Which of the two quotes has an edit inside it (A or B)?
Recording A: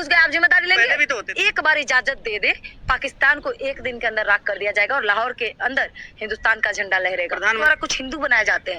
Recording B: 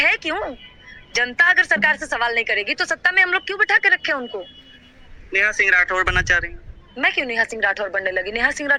A